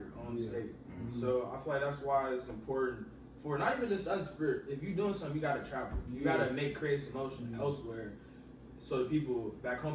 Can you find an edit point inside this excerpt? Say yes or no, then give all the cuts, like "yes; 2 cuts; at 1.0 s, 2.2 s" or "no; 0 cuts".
no; 0 cuts